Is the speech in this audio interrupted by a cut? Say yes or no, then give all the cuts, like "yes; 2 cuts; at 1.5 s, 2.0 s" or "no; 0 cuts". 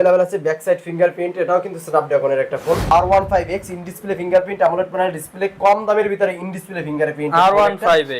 yes; 1 cut; at 2.9 s